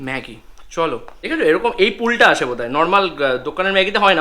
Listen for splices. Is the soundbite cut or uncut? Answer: cut